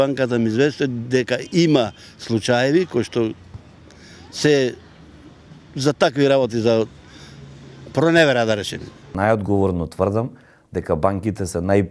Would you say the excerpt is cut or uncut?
cut